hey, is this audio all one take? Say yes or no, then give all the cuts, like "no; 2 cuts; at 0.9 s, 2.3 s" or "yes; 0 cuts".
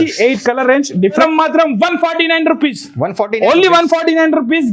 no; 1 cut; at 1.2 s